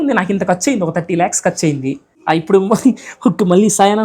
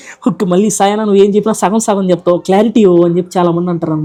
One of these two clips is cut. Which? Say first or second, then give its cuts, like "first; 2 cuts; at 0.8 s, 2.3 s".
first; 1 cut; at 2.1 s